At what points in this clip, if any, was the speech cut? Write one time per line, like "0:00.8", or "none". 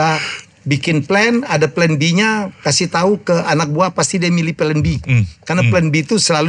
none